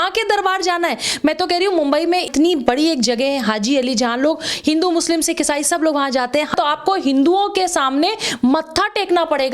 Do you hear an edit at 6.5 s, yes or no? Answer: yes